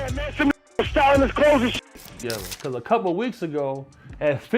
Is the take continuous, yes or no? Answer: no